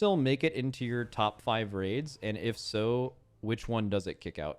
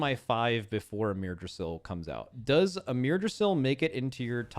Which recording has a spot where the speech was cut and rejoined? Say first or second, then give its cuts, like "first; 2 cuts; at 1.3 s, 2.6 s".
second; 1 cut; at 2.4 s